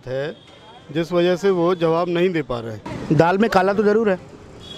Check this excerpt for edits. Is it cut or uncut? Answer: cut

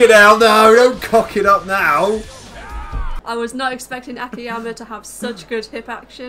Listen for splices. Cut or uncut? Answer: cut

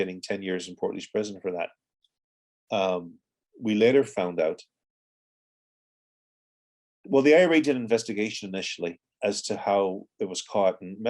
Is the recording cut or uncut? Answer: uncut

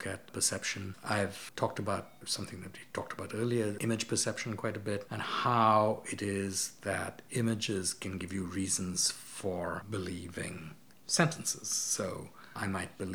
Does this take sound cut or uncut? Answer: uncut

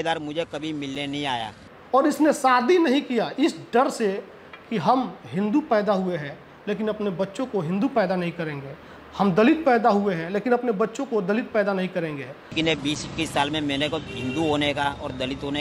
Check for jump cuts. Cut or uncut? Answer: cut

